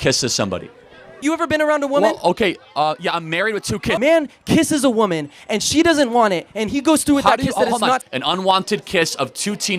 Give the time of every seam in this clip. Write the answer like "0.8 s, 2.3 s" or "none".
1.2 s, 4.0 s, 8.0 s